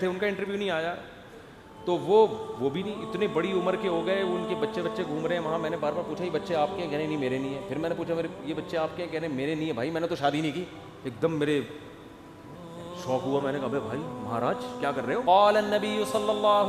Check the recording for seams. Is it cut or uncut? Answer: cut